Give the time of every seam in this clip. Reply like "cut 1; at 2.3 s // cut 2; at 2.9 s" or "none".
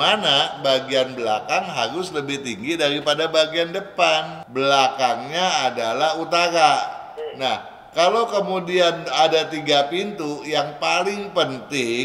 cut 1; at 4.4 s